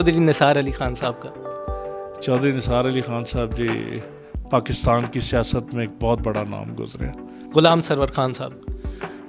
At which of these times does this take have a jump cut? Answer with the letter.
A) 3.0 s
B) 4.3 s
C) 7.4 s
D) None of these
C